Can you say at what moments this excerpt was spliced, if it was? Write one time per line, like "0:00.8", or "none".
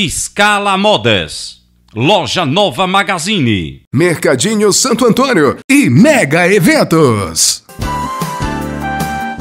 none